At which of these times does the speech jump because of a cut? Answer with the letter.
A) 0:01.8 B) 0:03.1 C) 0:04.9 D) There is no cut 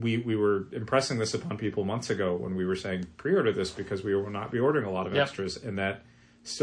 D